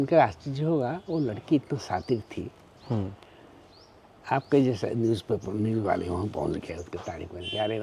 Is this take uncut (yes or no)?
yes